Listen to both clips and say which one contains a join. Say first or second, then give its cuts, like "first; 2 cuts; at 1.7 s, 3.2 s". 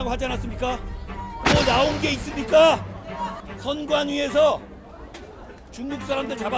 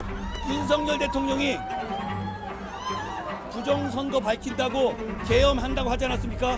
first; 1 cut; at 3.4 s